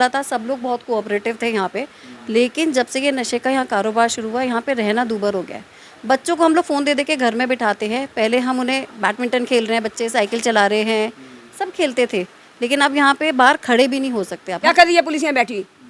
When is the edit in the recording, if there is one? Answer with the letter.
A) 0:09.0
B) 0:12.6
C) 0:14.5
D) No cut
C